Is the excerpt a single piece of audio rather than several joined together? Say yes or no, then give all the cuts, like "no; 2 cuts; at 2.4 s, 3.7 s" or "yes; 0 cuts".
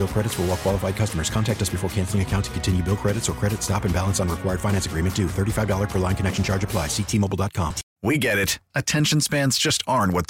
no; 1 cut; at 7.9 s